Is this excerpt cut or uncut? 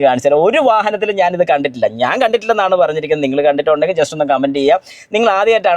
uncut